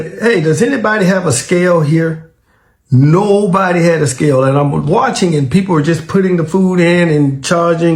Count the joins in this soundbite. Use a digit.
0